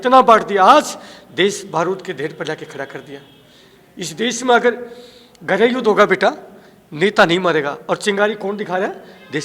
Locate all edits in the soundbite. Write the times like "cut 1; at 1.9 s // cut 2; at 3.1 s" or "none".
none